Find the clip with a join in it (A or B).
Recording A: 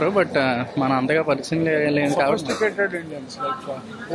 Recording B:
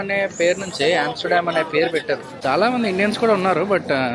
B